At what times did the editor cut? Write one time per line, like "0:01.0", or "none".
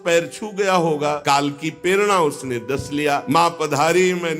0:01.2
0:03.2

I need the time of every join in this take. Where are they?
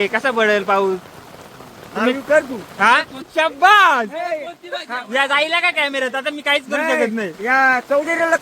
0:03.2

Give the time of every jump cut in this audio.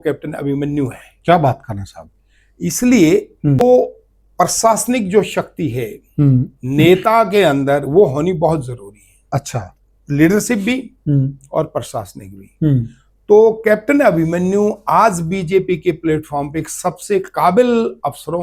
0:03.6

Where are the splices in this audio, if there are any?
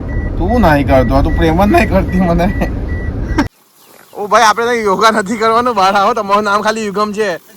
0:03.5

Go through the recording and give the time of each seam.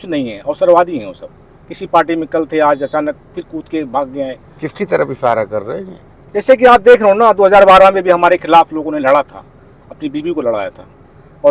none

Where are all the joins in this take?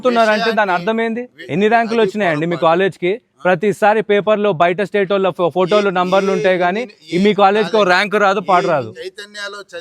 0:01.3
0:08.9

